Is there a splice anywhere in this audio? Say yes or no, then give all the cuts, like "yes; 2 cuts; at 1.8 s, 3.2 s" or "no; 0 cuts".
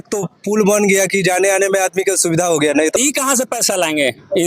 yes; 1 cut; at 3.0 s